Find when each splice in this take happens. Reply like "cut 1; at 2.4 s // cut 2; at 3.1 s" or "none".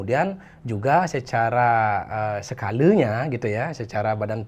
none